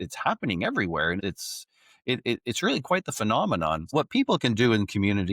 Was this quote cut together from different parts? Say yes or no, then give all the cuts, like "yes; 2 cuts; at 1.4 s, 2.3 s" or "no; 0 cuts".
yes; 2 cuts; at 1.2 s, 3.9 s